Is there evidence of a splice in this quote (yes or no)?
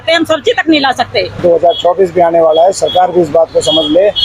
yes